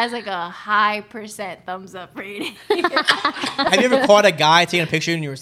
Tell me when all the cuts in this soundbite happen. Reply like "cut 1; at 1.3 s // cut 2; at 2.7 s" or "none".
cut 1; at 3.7 s

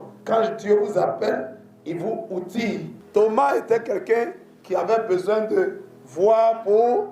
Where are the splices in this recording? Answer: cut 1; at 3.0 s

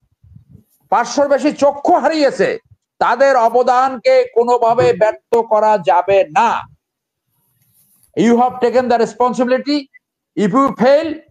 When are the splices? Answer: none

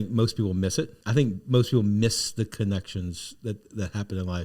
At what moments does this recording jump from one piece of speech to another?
cut 1; at 1.0 s

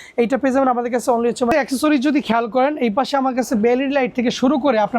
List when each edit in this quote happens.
cut 1; at 1.5 s

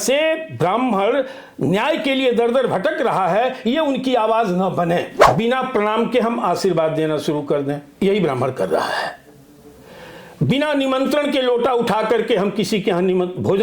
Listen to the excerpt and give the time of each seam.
cut 1; at 5.2 s

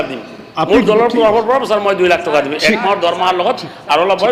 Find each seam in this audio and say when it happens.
none

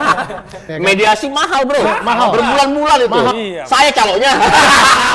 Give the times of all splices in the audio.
none

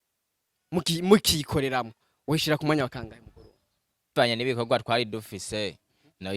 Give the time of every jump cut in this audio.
cut 1; at 4.1 s

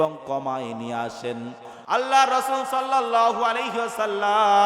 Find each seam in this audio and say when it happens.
cut 1; at 1.9 s

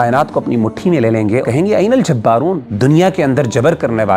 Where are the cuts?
cut 1; at 1.4 s // cut 2; at 2.7 s

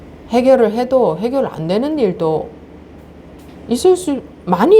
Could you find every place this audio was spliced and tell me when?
none

